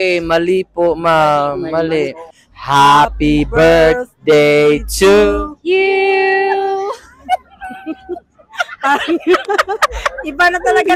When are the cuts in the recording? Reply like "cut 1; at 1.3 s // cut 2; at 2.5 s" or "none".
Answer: cut 1; at 2.3 s